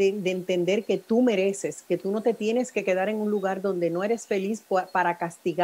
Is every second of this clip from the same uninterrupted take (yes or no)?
yes